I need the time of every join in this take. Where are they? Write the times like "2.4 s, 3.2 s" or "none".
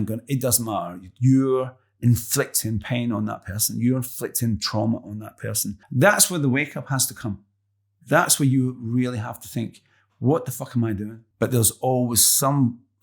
5.7 s, 11.2 s